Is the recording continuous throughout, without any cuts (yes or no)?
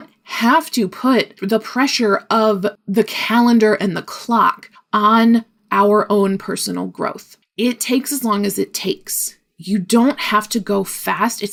yes